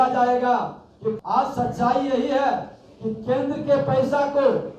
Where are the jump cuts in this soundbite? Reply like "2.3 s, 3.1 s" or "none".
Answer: 1.2 s